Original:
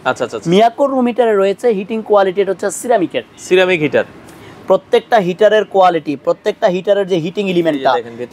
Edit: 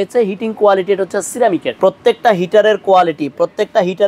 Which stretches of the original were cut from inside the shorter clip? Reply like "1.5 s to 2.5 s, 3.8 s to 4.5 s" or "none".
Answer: 3.2 s to 4.6 s